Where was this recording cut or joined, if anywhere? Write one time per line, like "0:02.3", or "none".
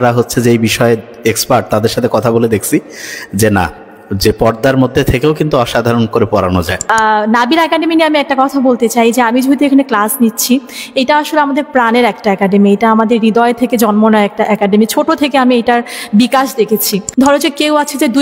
0:06.8
0:17.0

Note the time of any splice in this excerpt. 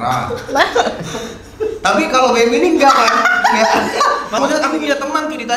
0:04.4

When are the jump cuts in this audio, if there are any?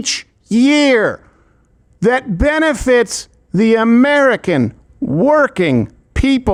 none

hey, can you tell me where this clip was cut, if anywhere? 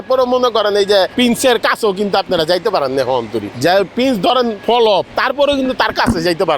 0:01.1
0:03.4
0:04.8

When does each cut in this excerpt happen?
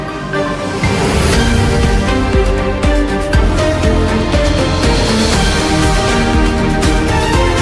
none

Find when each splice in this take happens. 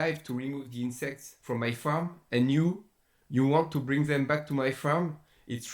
none

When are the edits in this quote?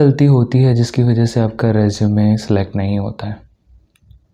none

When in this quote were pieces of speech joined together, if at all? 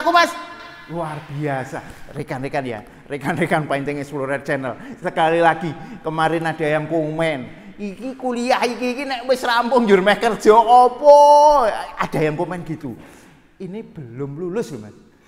none

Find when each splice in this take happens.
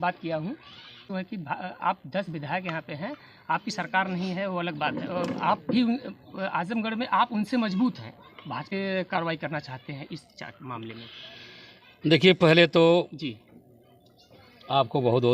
0:01.0
0:08.7

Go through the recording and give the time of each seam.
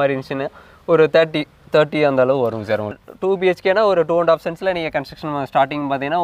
0:03.0

